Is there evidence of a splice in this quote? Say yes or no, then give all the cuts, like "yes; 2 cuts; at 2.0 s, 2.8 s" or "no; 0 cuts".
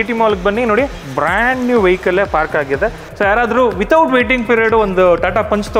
yes; 1 cut; at 3.0 s